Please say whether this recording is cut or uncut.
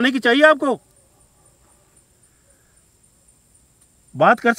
uncut